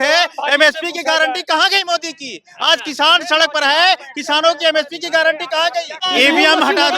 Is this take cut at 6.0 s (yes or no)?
yes